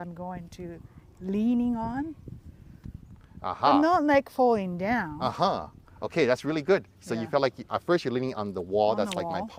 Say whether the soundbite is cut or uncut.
uncut